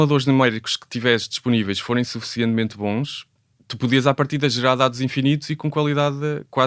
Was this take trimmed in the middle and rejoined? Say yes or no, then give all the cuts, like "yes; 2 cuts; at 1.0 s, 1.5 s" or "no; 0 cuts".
no; 0 cuts